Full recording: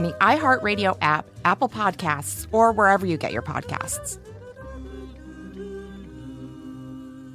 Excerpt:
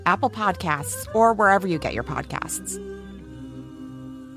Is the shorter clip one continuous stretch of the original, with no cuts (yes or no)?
no